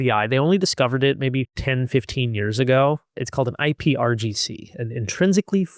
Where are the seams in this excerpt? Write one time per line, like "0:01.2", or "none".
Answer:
none